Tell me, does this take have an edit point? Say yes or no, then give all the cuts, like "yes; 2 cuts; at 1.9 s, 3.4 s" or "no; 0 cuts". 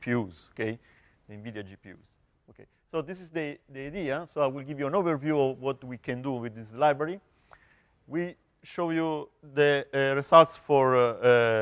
yes; 1 cut; at 10.0 s